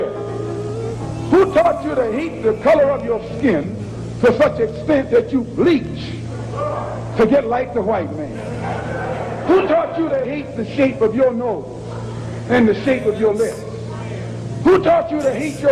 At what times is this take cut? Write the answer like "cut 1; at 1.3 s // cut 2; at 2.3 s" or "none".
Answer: none